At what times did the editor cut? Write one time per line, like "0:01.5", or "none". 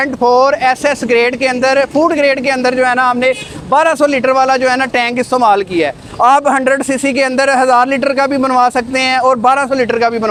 none